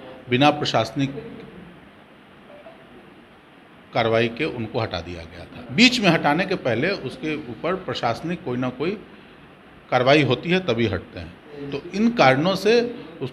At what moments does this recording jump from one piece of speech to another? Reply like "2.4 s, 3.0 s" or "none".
5.5 s